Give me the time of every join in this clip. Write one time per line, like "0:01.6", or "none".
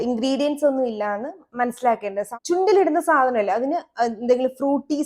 0:02.2